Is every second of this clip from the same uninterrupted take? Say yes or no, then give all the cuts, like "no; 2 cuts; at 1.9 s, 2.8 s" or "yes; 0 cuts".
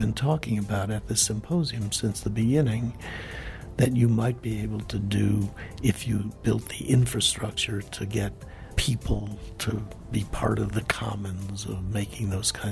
yes; 0 cuts